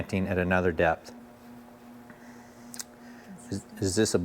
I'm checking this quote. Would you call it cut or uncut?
cut